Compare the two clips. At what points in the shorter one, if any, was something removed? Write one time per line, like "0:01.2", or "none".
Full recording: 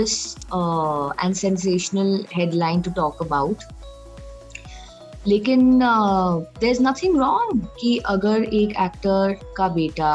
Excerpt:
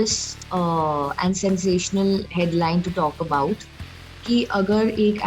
0:04.2